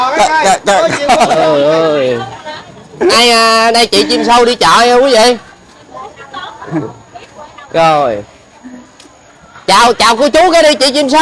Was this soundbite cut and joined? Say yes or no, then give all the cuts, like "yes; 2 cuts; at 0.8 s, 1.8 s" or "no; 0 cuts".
no; 0 cuts